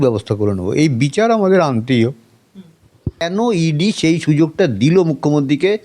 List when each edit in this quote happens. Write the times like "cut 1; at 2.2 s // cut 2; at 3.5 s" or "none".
cut 1; at 3.2 s